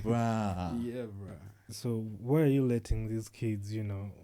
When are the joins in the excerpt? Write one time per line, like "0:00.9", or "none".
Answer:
0:01.7